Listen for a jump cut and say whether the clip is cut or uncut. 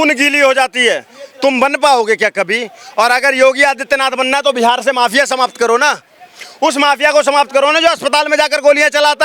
uncut